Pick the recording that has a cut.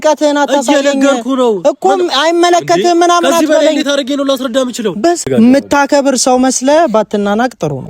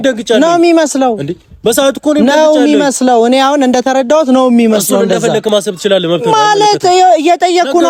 first; 1 cut; at 5.3 s

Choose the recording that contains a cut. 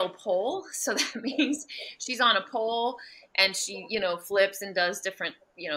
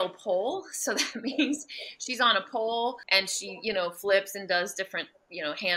second; 1 cut; at 3.0 s

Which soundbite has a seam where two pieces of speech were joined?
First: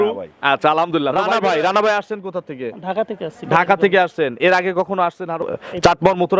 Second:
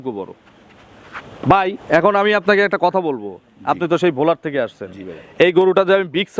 first; 2 cuts; at 1.2 s, 5.4 s

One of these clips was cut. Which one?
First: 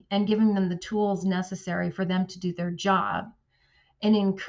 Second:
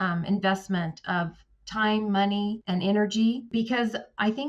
second; 2 cuts; at 2.6 s, 3.5 s

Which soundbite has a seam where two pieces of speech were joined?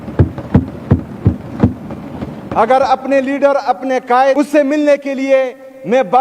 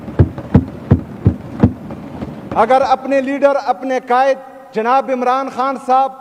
first; 1 cut; at 4.4 s

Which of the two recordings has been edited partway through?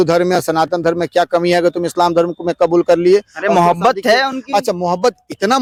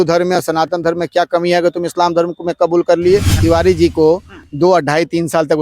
second; 1 cut; at 3.4 s

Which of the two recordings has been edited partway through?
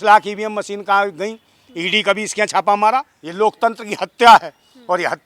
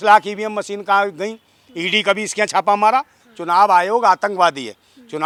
first; 1 cut; at 3.2 s

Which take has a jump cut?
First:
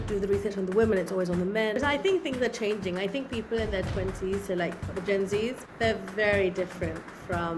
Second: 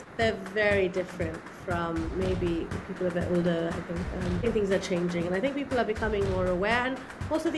first; 1 cut; at 1.8 s

